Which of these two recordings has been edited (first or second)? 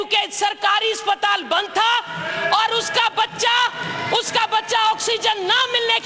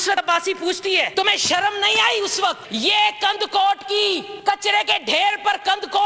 second